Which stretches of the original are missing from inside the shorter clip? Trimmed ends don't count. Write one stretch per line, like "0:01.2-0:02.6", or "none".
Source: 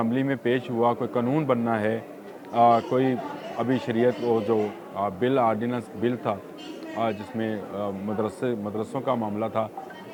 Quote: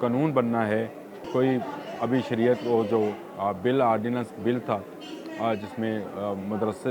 0:02.4-0:02.9